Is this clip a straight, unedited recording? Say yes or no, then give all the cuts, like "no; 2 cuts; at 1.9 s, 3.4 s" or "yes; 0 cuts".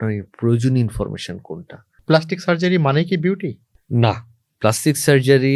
no; 1 cut; at 1.9 s